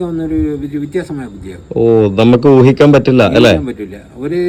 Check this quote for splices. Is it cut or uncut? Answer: uncut